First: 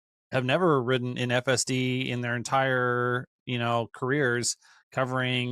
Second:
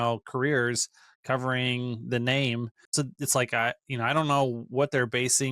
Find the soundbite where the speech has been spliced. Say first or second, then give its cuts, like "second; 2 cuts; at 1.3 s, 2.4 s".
second; 1 cut; at 2.8 s